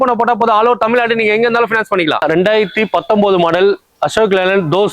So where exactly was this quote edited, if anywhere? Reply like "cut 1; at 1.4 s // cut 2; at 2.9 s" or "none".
cut 1; at 2.2 s